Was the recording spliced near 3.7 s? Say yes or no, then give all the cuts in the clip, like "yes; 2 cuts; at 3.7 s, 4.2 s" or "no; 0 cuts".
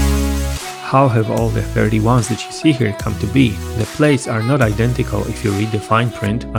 no; 0 cuts